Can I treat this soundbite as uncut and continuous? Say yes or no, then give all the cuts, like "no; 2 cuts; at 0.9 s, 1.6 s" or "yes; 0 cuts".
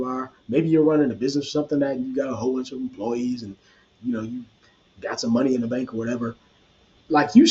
yes; 0 cuts